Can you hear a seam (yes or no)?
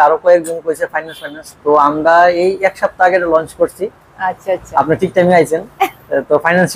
no